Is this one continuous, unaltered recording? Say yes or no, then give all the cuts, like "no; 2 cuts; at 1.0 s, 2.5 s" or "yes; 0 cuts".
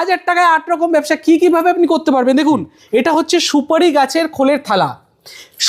yes; 0 cuts